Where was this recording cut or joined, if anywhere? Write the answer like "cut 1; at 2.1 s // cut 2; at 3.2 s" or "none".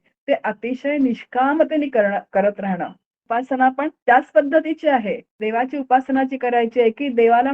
cut 1; at 3.1 s // cut 2; at 4.0 s // cut 3; at 5.4 s

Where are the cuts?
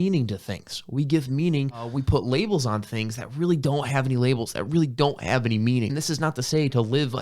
cut 1; at 2.0 s // cut 2; at 5.9 s

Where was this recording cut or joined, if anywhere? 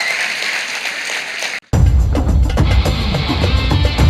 cut 1; at 1.6 s

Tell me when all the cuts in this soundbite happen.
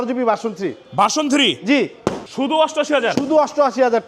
cut 1; at 2.3 s

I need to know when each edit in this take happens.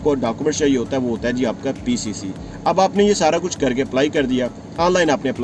none

